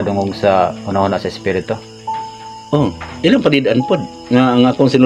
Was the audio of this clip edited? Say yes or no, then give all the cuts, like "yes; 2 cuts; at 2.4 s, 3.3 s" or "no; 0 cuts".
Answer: no; 0 cuts